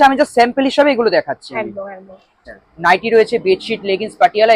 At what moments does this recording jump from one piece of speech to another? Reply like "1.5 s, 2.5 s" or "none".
2.4 s